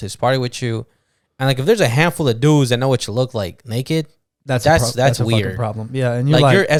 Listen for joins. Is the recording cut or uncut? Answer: uncut